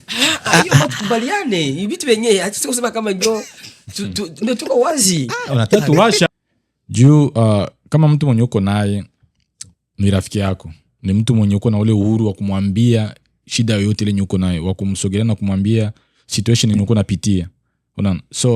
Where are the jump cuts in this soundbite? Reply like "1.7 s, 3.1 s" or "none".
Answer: 6.3 s